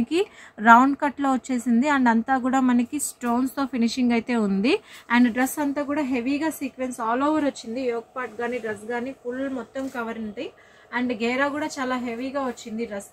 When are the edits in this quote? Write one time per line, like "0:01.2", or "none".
none